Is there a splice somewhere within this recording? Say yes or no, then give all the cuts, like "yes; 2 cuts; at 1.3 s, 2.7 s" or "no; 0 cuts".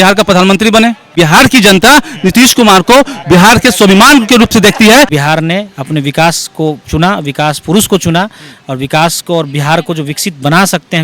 yes; 2 cuts; at 1.1 s, 5.1 s